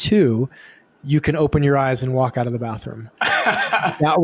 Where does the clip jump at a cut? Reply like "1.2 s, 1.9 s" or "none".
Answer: none